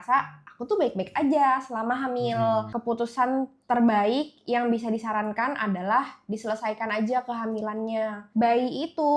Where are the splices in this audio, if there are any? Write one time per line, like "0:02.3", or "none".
0:02.7
0:08.2